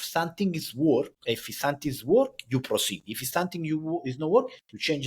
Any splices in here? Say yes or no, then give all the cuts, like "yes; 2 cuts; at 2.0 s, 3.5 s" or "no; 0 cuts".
yes; 1 cut; at 1.2 s